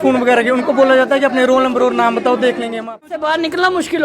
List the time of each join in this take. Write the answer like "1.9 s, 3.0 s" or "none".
3.1 s

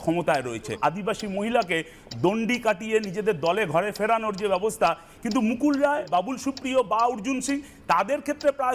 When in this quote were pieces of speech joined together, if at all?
0.8 s, 5.1 s, 6.1 s

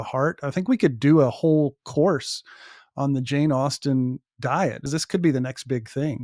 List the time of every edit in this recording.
4.8 s

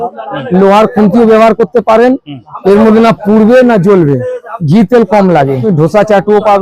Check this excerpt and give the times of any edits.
5.6 s

